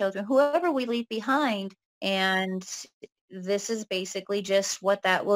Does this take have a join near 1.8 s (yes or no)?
yes